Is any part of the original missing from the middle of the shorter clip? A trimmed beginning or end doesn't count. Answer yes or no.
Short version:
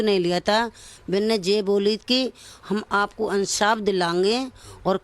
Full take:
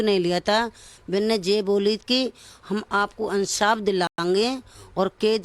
yes